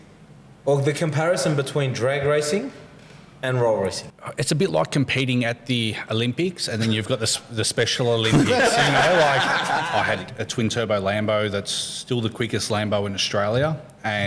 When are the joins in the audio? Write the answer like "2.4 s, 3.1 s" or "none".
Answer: 4.0 s, 9.9 s